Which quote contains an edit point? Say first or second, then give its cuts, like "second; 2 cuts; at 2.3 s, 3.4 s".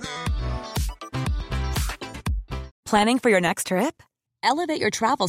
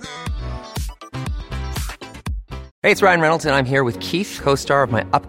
second; 1 cut; at 2.7 s